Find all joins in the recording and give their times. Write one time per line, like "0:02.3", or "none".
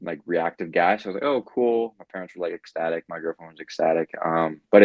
none